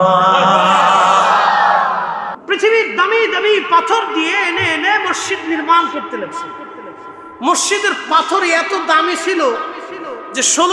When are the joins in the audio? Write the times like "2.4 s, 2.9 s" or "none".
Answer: 2.3 s